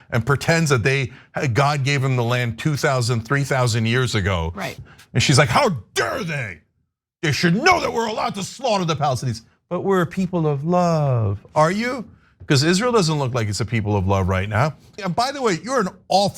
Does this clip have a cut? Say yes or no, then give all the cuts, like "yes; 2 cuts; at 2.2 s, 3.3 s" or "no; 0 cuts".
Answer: yes; 2 cuts; at 4.7 s, 15.0 s